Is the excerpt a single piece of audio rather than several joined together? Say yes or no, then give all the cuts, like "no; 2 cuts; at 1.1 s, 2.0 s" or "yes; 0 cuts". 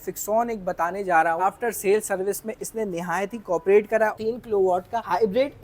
no; 2 cuts; at 1.4 s, 4.2 s